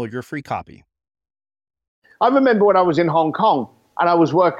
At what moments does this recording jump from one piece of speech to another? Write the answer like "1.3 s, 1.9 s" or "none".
2.0 s